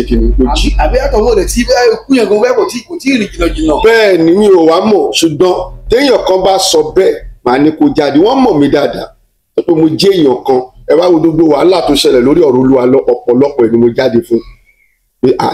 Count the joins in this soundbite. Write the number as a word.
zero